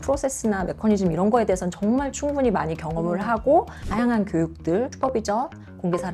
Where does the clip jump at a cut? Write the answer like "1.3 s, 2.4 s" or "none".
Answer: 3.8 s, 4.9 s